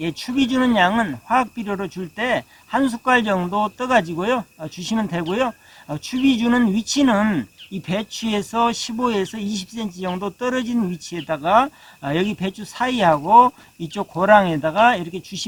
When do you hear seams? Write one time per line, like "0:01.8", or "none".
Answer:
none